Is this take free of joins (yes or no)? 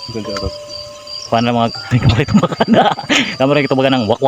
no